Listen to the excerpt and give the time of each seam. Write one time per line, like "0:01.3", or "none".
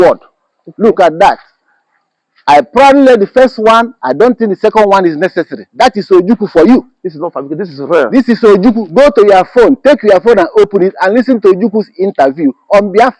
none